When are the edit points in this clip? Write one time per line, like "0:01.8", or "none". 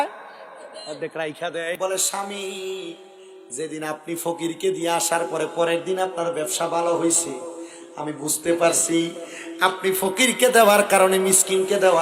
0:01.8